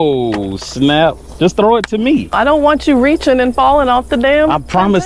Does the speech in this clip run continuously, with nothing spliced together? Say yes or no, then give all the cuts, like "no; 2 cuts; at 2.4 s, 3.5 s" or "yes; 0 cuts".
no; 2 cuts; at 1.3 s, 2.3 s